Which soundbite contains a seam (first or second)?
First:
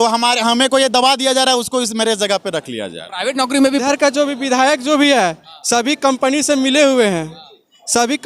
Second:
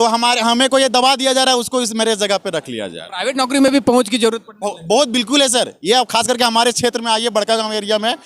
first